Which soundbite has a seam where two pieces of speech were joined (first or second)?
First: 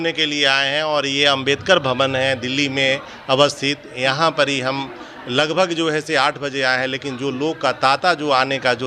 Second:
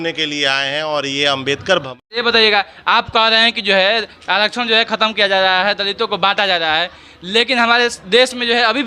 second